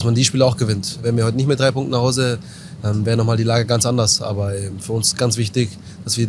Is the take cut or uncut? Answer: cut